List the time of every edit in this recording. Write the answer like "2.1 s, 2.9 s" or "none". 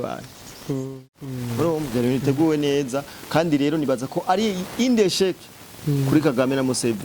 1.3 s